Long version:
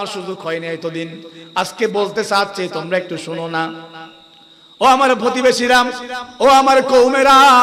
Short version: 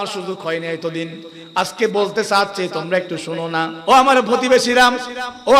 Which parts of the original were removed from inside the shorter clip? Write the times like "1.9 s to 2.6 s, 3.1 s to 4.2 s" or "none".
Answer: 3.8 s to 4.7 s